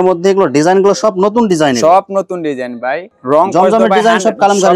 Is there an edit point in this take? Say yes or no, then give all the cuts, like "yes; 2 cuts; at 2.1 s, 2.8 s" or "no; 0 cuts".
no; 0 cuts